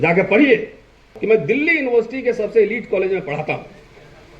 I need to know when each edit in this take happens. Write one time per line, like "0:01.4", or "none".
0:01.2